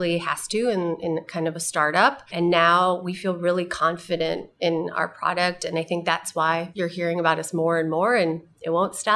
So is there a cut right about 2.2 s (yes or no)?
yes